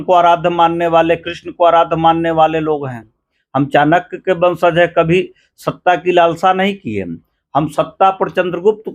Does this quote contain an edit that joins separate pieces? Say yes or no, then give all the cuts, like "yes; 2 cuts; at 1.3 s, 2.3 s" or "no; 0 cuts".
no; 0 cuts